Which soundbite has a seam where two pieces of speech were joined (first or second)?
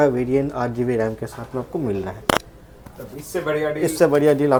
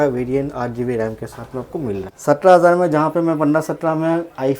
second